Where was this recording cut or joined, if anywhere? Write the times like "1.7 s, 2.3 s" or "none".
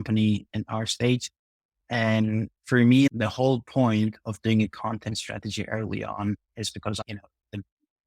3.1 s